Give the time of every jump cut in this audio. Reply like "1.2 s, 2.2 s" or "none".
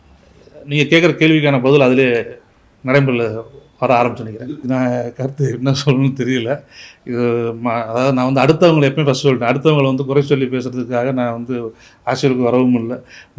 4.6 s